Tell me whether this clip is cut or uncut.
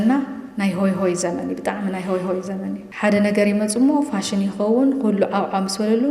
cut